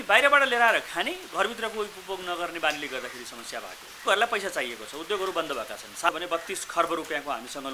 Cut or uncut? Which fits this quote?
cut